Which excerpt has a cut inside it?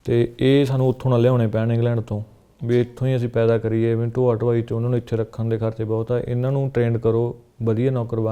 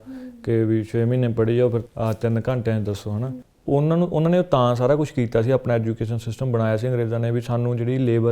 second; 2 cuts; at 1.8 s, 3.2 s

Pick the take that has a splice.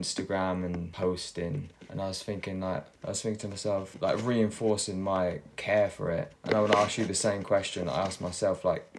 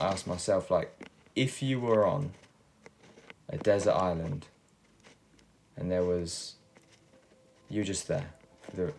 first; 5 cuts; at 0.9 s, 1.8 s, 2.9 s, 3.9 s, 6.3 s

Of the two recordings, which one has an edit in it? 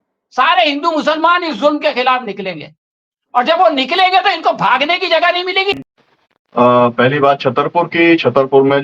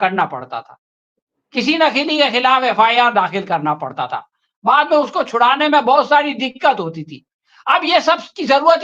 first; 1 cut; at 5.8 s

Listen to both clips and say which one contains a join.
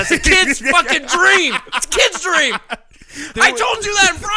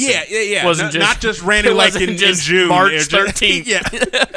first; 1 cut; at 3.3 s

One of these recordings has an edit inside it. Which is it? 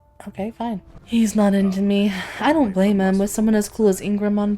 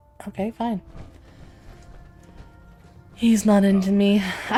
first; 1 cut; at 0.9 s

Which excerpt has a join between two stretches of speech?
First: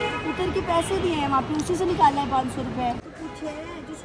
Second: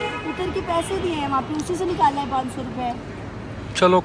first; 1 cut; at 3.1 s

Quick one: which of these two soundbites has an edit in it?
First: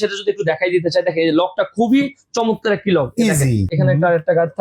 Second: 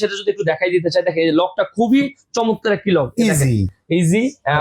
first; 1 cut; at 3.7 s

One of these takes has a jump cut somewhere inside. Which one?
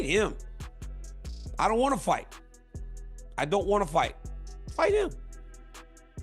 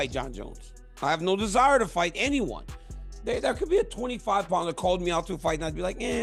first; 1 cut; at 5.2 s

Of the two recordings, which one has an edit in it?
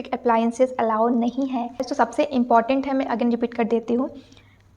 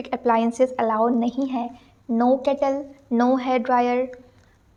first; 1 cut; at 1.9 s

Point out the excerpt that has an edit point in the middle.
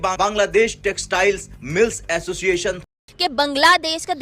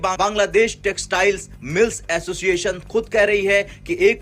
first; 1 cut; at 2.8 s

